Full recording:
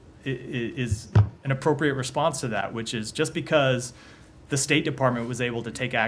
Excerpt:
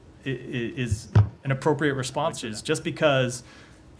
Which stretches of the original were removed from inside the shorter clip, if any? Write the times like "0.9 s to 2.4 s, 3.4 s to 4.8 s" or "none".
2.4 s to 2.9 s